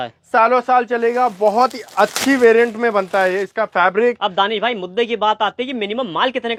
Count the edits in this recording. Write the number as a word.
zero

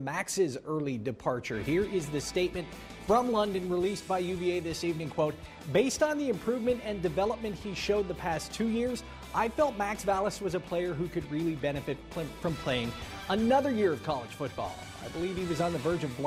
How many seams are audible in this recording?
one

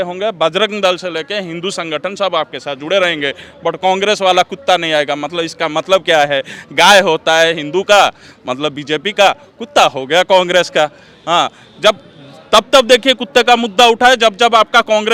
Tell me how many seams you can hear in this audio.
zero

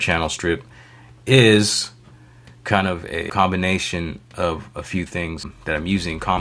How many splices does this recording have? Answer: two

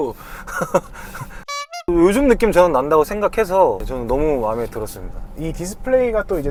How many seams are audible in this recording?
zero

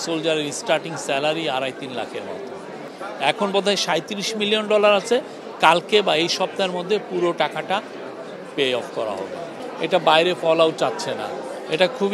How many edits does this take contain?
two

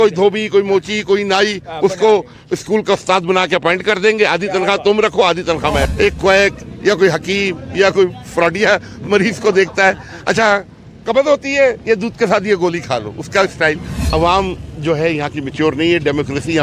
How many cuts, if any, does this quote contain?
two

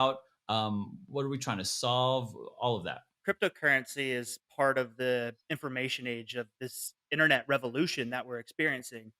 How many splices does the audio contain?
one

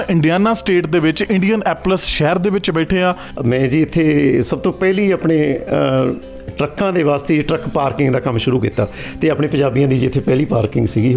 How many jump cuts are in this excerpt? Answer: one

